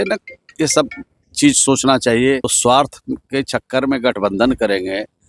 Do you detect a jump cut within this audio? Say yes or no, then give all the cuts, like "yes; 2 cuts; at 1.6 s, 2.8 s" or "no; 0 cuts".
yes; 1 cut; at 2.5 s